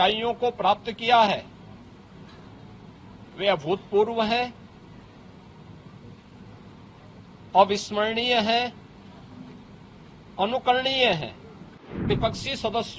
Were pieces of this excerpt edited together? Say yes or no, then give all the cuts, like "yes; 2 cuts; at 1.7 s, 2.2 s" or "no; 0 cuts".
yes; 1 cut; at 12.0 s